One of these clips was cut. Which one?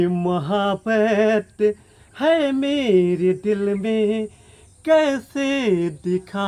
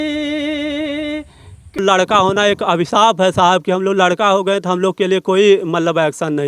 second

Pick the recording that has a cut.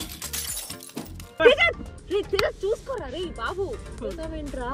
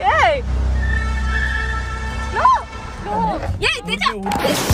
second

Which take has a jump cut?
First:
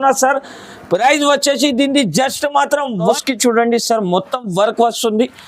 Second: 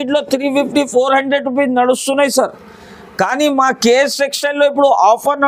first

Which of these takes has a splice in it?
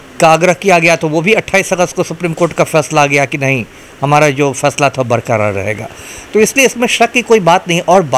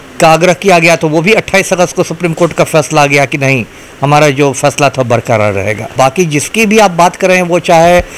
second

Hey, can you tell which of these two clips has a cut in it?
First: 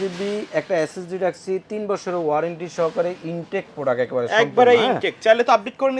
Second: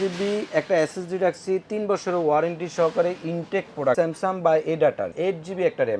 second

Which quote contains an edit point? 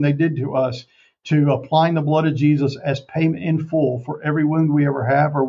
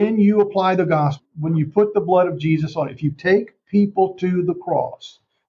second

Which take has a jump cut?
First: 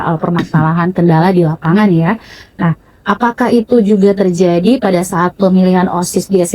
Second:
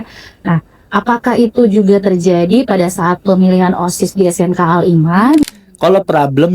second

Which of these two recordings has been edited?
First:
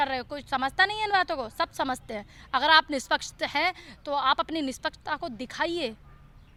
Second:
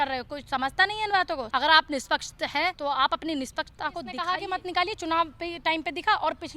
second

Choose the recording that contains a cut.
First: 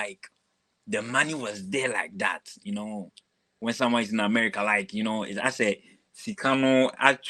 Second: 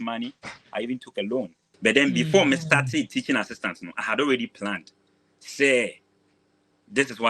second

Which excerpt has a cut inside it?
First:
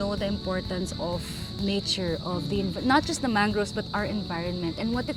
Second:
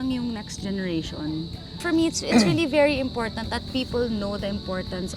second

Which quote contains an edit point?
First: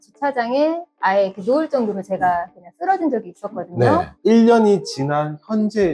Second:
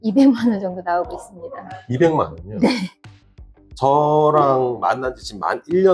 first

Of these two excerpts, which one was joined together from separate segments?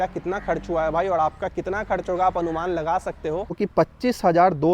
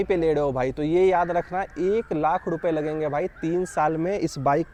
first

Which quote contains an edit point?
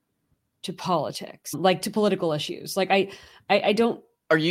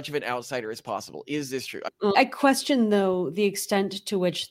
second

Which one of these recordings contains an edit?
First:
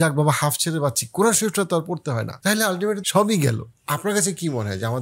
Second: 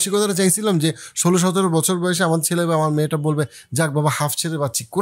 first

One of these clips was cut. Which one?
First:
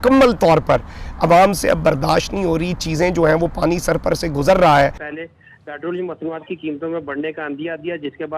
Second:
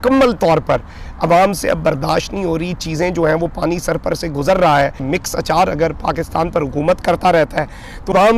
first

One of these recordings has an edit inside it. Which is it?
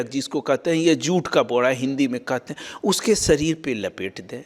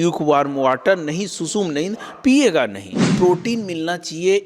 second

